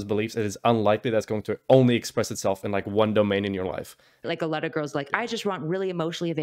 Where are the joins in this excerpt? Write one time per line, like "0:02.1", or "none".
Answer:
0:04.2